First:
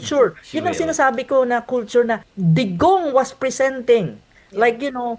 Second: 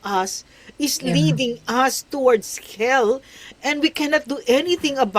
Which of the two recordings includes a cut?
first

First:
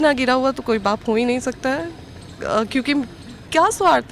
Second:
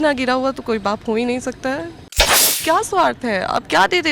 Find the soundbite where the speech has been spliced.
second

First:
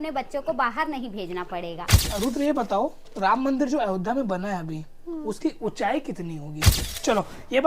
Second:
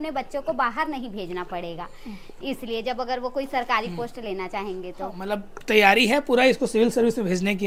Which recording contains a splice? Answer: first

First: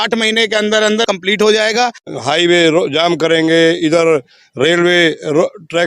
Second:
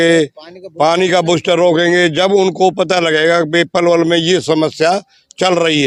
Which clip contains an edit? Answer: first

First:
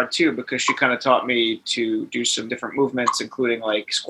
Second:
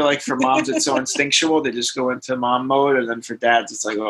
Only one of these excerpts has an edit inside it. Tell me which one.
first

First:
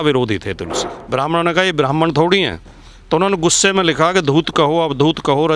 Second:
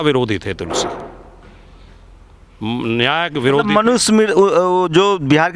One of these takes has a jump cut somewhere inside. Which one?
first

